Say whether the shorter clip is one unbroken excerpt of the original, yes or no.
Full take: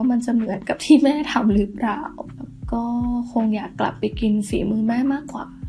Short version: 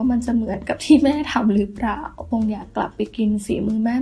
no